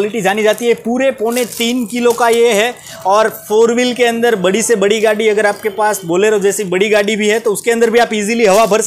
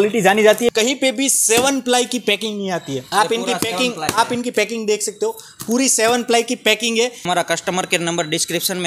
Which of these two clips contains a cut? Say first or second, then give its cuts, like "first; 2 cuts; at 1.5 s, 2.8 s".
second; 3 cuts; at 0.7 s, 3.0 s, 7.3 s